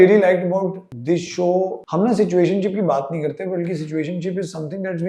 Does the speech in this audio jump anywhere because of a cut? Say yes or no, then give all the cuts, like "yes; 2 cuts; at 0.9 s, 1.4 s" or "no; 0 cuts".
yes; 2 cuts; at 0.9 s, 1.8 s